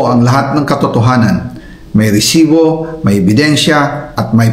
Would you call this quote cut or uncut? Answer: uncut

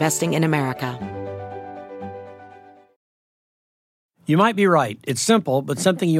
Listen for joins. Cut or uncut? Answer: cut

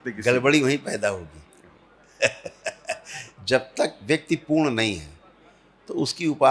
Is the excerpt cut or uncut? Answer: uncut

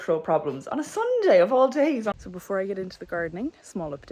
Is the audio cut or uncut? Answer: cut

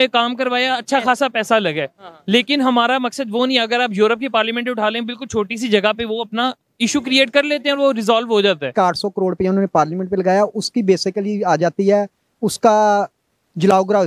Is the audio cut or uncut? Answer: cut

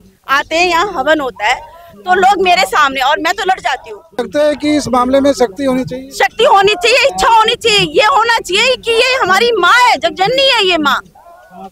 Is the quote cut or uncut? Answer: cut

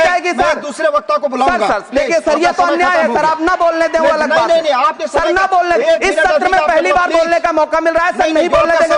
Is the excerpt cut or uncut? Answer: uncut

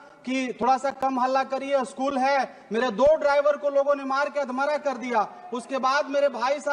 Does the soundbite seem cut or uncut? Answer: uncut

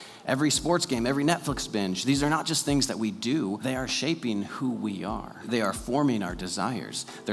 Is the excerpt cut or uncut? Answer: cut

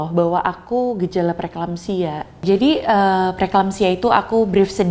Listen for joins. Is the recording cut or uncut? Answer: uncut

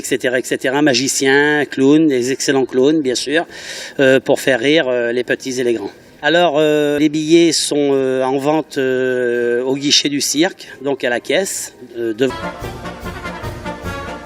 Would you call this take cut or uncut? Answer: uncut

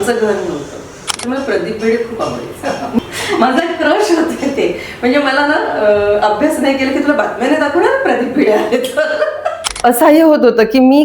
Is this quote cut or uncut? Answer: cut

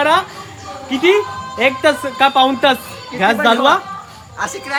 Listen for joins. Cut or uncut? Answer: uncut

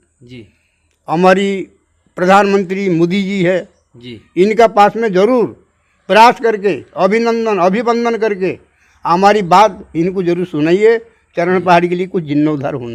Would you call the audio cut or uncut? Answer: uncut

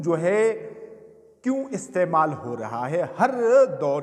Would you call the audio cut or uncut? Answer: uncut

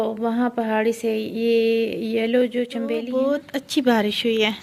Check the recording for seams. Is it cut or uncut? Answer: cut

